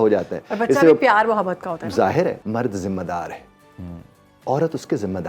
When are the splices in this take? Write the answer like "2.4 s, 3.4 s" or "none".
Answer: 2.4 s

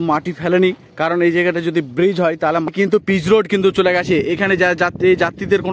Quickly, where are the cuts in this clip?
2.7 s

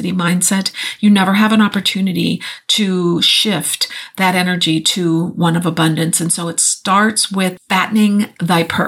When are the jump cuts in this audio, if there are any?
7.6 s

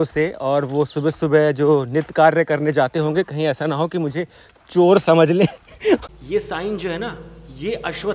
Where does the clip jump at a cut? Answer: 6.1 s

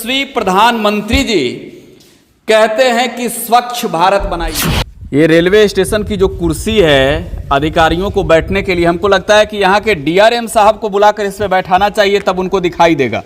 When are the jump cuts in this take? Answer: 4.5 s

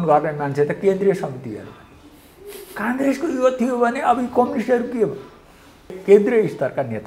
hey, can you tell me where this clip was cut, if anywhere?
6.0 s

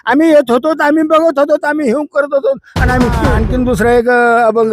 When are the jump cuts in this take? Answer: 3.2 s

